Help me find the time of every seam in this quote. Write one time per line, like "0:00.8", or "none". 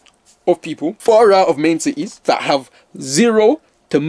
0:01.0
0:02.1